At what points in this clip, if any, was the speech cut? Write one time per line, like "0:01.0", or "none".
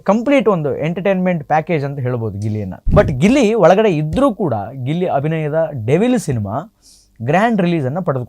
0:02.7